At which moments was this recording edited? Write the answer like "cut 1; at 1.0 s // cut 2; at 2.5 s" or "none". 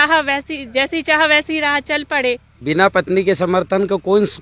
cut 1; at 2.5 s